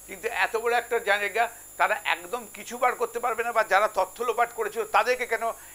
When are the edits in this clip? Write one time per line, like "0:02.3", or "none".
none